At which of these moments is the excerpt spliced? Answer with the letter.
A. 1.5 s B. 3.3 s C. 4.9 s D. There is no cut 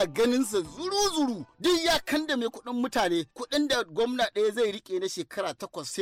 A